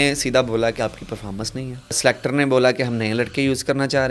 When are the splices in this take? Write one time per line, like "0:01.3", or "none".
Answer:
0:02.0